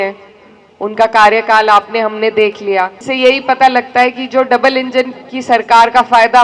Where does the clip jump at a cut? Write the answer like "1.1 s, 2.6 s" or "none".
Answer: 3.0 s